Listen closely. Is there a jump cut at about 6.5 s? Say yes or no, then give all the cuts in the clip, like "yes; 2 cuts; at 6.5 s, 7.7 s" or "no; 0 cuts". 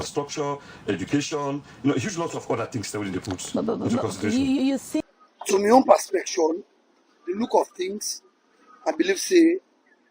no; 1 cut; at 5.0 s